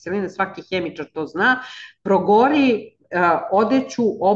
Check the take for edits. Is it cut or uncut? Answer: uncut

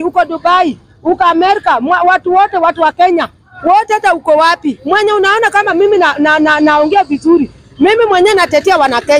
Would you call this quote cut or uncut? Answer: uncut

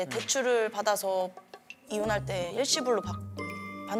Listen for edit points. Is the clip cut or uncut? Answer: uncut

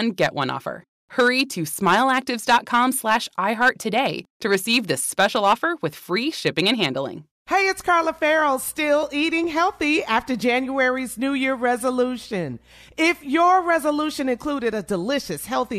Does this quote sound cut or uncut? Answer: uncut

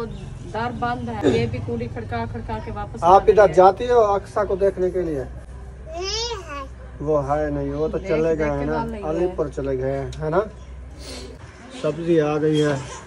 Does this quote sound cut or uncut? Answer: cut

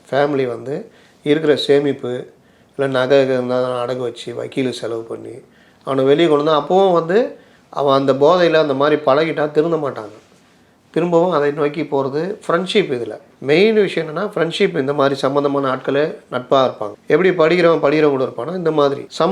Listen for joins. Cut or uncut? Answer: uncut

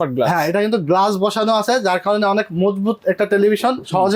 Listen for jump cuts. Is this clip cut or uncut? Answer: uncut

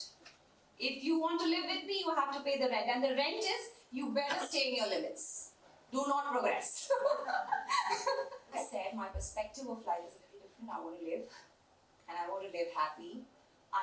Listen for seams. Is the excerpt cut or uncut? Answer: cut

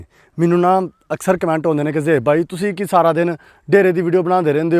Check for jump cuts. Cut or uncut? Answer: uncut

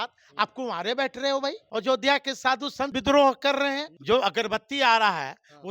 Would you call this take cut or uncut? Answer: cut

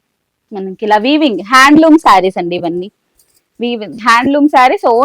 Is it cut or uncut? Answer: uncut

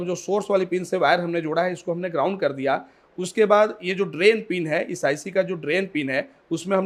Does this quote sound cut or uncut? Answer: uncut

